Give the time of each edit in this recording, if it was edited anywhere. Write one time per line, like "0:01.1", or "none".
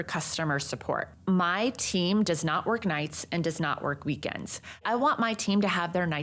0:01.1
0:04.8